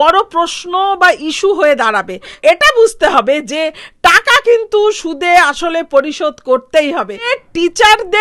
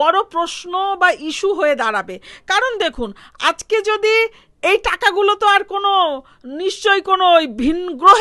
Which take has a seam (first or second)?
first